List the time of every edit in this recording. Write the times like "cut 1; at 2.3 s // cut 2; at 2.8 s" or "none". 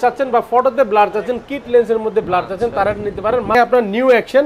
cut 1; at 3.5 s